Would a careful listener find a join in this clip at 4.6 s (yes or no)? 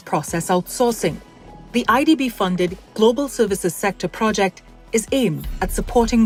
no